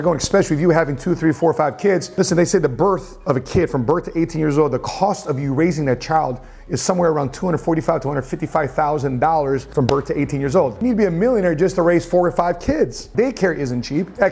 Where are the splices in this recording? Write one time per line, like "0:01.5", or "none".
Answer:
0:10.7
0:13.1